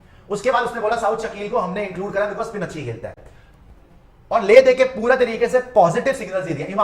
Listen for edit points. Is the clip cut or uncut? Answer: uncut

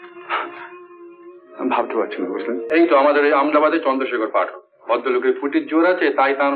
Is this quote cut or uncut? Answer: cut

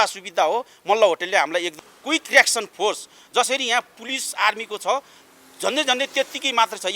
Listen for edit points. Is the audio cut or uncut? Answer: cut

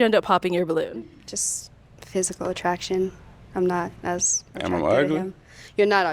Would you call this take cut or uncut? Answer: uncut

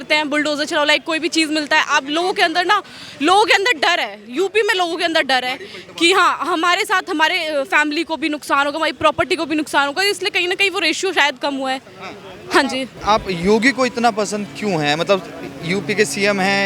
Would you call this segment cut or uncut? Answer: uncut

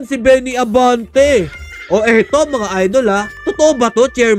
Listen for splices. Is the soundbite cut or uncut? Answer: uncut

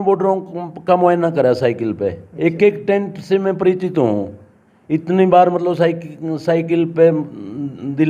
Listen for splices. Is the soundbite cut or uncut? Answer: uncut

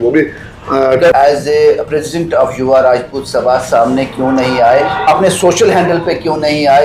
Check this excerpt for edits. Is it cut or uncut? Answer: cut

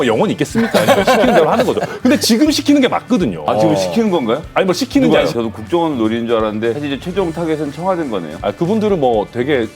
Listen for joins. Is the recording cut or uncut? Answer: cut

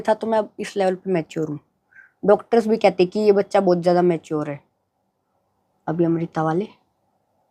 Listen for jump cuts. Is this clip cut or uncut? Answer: uncut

